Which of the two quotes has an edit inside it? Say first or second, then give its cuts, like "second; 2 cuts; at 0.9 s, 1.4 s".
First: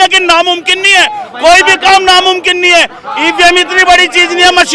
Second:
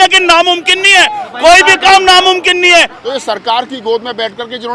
second; 1 cut; at 3.0 s